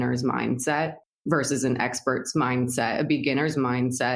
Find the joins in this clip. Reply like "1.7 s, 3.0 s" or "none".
1.1 s